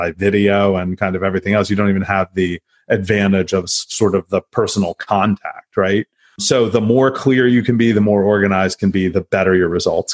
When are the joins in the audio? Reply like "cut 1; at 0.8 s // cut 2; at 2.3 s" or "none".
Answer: cut 1; at 6.4 s